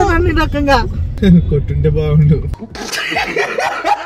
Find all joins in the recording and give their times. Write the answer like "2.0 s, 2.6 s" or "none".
1.0 s